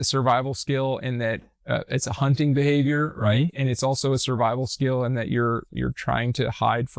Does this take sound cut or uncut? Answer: uncut